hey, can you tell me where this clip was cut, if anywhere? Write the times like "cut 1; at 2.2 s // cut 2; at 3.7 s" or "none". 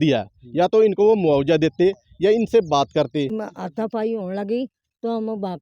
cut 1; at 3.4 s